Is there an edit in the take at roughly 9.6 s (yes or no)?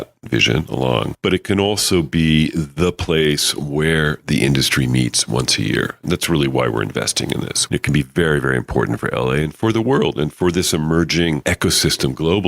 no